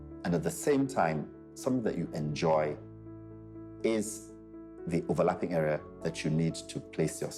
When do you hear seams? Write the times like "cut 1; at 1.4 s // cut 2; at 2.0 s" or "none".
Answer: none